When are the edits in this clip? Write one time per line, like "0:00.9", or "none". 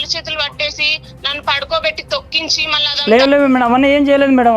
0:02.7

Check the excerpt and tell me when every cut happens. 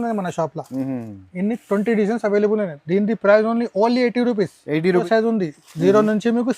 0:05.0

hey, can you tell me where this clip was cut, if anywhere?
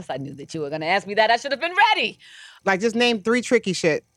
0:02.6

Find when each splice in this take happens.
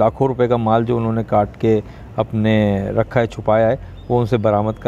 none

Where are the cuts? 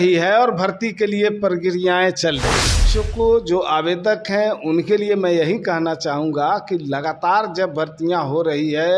0:02.9

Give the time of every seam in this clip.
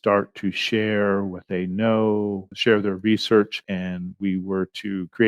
0:02.5
0:03.6

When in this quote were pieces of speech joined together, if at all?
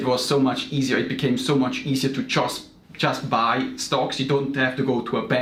none

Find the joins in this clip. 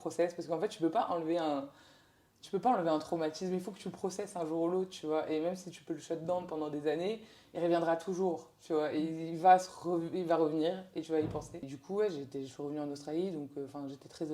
0:11.8

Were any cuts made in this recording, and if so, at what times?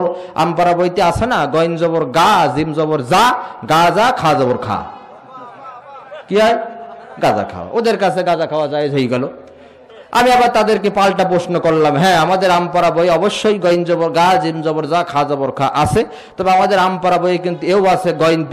none

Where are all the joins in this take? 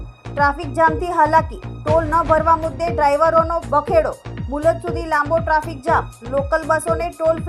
0:03.6

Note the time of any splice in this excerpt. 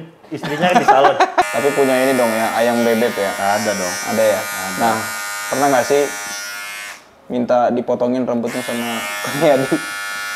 0:01.5

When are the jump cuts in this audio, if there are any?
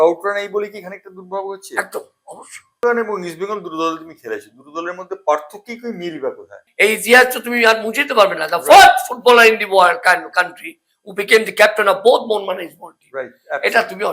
0:02.8
0:06.6

